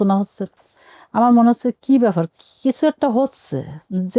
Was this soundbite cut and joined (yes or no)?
no